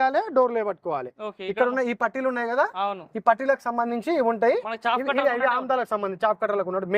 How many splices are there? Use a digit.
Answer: 0